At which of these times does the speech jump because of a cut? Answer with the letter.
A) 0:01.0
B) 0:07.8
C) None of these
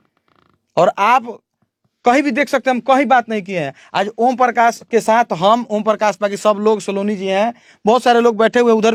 C